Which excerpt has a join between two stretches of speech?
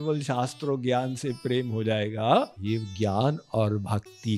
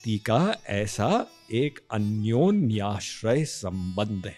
first; 1 cut; at 2.6 s

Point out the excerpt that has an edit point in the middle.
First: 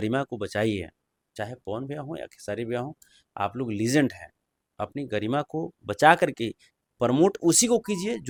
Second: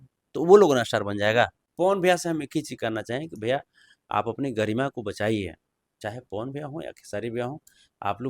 second; 1 cut; at 1.6 s

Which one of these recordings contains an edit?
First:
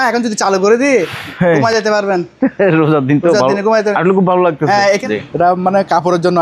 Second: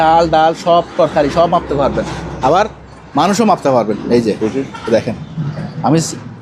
first; 1 cut; at 5.0 s

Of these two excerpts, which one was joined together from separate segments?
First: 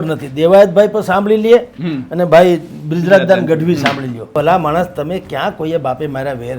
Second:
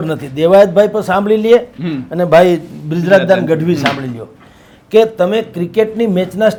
first; 1 cut; at 4.3 s

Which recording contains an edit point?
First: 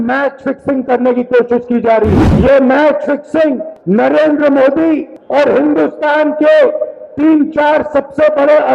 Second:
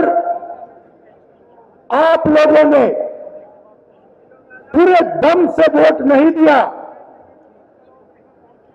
first; 3 cuts; at 2.3 s, 3.7 s, 5.2 s

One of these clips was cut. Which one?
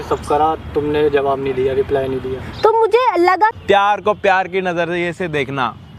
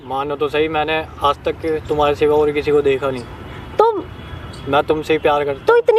first; 1 cut; at 3.6 s

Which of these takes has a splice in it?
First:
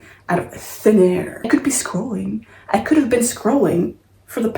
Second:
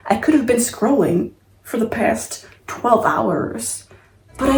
first; 1 cut; at 1.5 s

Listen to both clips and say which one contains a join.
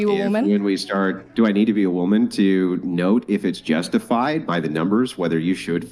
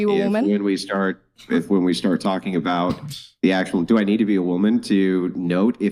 first; 1 cut; at 1.3 s

